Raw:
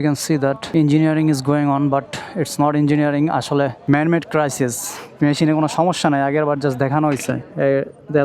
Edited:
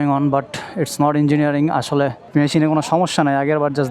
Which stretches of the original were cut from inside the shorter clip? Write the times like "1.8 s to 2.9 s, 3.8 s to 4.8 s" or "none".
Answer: 3.8 s to 5.0 s